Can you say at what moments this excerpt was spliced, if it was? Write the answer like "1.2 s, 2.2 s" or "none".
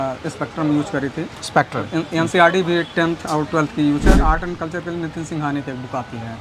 4.1 s